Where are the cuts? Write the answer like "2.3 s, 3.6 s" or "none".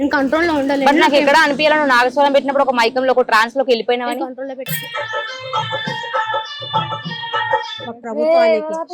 8.0 s

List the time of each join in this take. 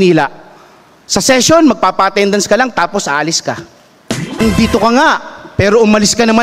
4.4 s

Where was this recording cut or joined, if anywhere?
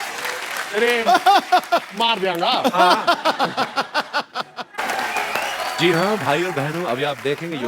4.8 s

